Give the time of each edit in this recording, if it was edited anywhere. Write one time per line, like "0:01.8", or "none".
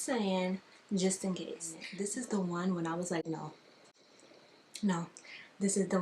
0:01.8